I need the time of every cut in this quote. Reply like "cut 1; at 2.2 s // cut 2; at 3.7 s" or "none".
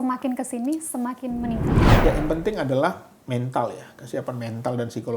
cut 1; at 1.8 s